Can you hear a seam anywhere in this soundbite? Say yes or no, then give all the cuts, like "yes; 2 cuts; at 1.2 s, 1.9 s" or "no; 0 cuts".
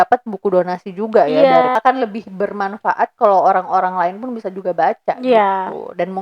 yes; 1 cut; at 1.7 s